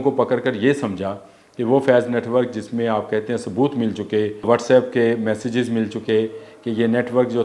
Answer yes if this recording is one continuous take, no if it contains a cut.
no